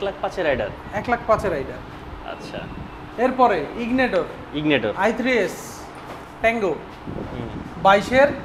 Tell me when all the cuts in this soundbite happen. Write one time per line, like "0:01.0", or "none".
none